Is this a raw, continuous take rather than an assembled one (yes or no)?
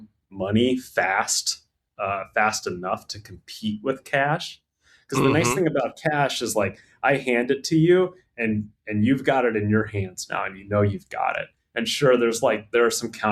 yes